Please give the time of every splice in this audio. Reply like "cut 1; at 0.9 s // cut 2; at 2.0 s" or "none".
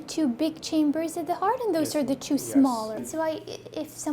cut 1; at 3.0 s